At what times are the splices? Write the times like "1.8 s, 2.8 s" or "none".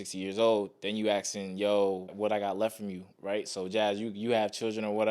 2.1 s